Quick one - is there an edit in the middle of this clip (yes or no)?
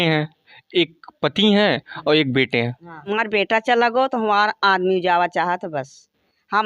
yes